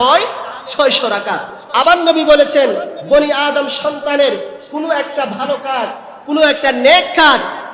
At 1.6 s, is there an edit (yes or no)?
yes